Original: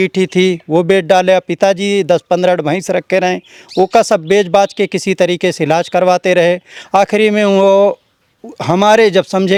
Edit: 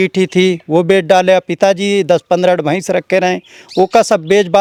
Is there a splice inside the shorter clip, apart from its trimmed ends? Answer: no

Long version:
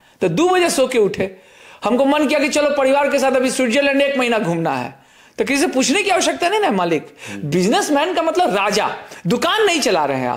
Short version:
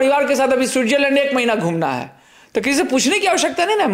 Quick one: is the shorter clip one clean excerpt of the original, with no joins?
yes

